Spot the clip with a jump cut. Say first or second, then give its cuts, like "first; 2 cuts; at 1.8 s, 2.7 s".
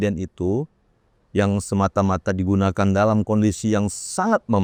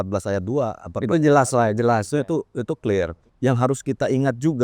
second; 1 cut; at 3.2 s